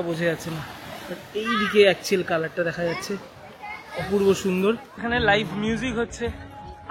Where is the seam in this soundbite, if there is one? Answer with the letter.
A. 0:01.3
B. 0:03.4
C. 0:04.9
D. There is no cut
C